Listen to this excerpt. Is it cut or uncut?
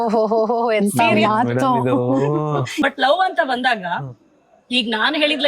cut